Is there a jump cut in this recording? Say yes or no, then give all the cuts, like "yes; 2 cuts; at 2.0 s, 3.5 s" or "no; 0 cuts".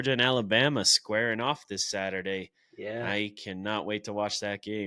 no; 0 cuts